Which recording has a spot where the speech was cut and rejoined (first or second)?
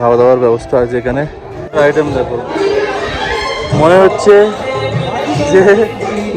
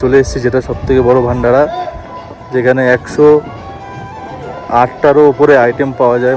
first